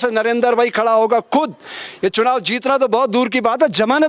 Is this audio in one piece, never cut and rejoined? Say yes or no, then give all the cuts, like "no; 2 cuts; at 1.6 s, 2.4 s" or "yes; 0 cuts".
yes; 0 cuts